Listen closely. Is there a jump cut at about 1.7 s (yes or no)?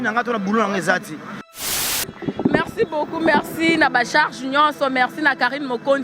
yes